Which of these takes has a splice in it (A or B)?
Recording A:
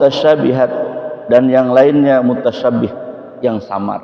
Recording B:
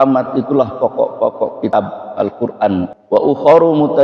B